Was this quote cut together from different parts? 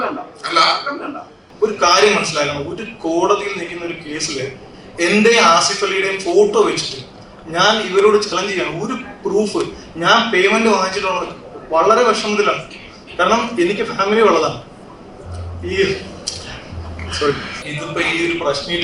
yes; 2 cuts; at 1.4 s, 17.6 s

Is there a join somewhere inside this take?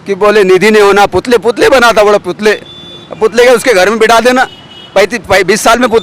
no; 0 cuts

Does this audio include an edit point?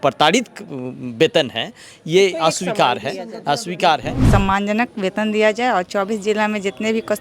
yes; 1 cut; at 4.2 s

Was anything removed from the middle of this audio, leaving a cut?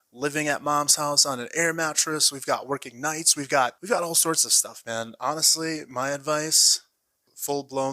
yes; 1 cut; at 3.8 s

